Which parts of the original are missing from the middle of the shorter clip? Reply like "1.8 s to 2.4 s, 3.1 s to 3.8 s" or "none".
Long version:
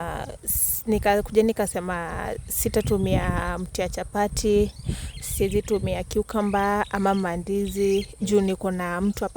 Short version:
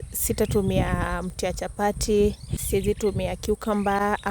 4.9 s to 5.2 s

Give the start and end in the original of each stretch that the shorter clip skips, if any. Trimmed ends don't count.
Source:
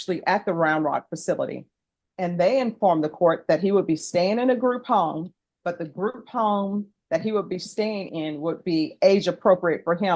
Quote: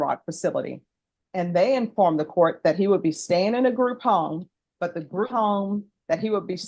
6.1 s to 6.3 s

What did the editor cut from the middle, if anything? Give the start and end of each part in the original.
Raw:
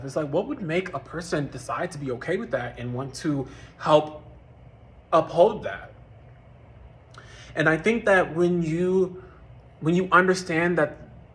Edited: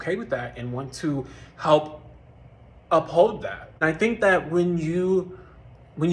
6.0 s to 7.7 s

